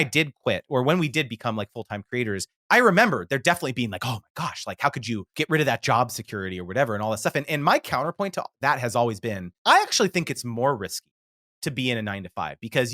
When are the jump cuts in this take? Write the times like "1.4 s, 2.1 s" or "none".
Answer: 5.3 s, 9.5 s